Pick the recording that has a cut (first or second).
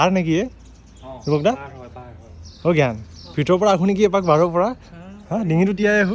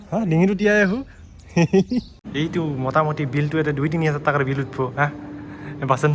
second